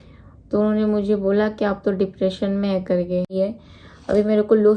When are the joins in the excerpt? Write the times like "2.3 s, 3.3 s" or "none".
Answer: 3.3 s